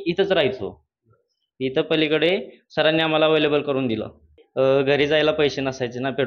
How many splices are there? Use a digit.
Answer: 1